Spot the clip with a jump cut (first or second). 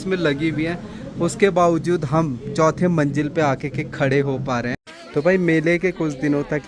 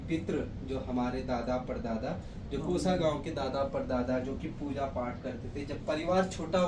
first